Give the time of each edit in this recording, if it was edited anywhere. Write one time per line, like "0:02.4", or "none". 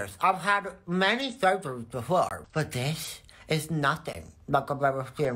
0:02.4

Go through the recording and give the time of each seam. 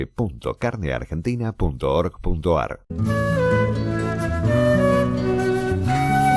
0:02.9

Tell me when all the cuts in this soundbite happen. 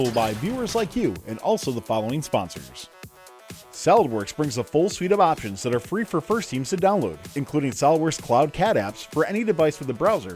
0:03.2

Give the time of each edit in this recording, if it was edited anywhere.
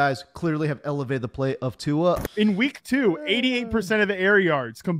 0:02.2

